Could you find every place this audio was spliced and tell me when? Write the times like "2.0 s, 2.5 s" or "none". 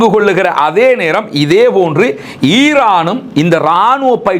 none